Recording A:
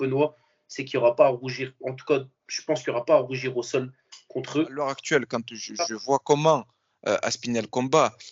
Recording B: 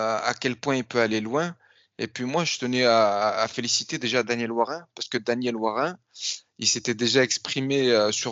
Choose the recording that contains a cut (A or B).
A